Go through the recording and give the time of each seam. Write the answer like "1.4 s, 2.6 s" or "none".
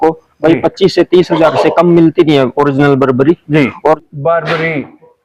3.8 s

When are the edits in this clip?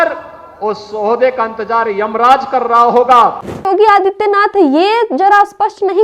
3.7 s

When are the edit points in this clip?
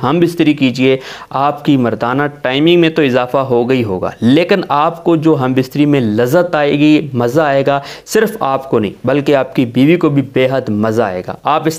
none

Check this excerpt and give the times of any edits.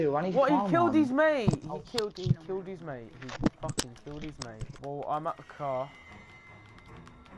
4.7 s

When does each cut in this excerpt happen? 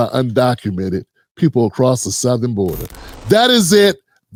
none

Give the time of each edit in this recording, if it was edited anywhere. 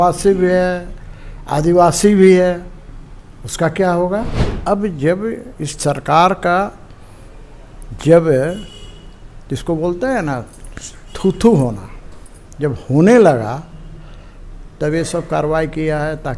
4.5 s

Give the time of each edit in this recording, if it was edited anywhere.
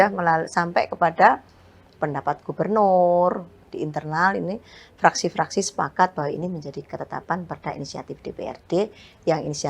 3.6 s

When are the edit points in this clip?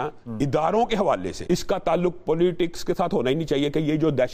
1.3 s

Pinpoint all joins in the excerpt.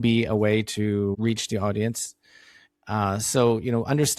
1.2 s

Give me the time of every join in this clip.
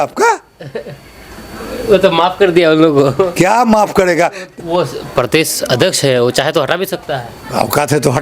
4.6 s

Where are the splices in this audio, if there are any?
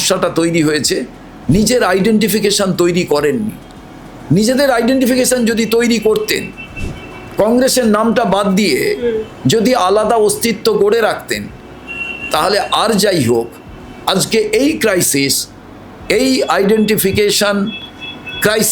none

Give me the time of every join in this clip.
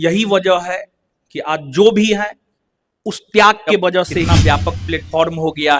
4.3 s

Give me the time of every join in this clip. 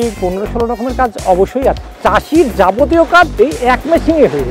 1.9 s, 3.3 s

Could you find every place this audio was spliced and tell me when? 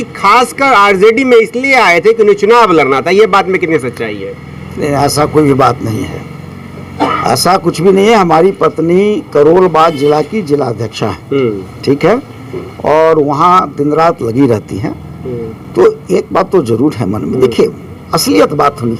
none

